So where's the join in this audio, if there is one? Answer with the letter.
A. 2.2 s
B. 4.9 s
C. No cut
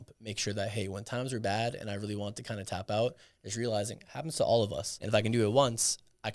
B